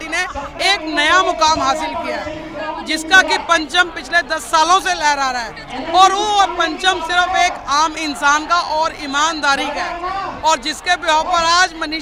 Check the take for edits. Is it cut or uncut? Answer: uncut